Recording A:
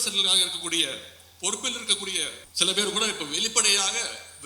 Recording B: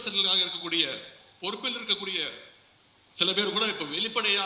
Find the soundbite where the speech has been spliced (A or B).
A